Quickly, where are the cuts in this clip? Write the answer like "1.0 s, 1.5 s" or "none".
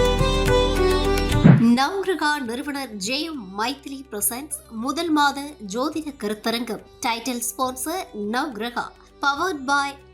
1.4 s

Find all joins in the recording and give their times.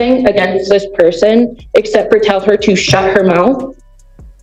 none

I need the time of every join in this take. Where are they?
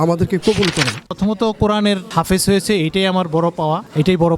1.0 s

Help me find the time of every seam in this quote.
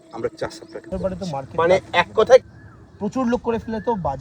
2.4 s

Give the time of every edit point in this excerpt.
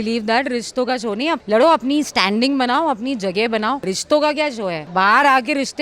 1.4 s, 3.9 s, 4.8 s

